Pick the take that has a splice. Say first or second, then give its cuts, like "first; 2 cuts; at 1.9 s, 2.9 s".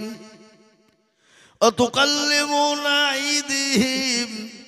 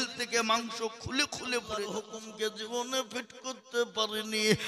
second; 1 cut; at 2.2 s